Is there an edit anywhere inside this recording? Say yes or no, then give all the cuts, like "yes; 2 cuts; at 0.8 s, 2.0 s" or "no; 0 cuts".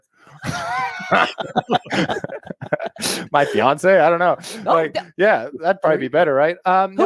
no; 0 cuts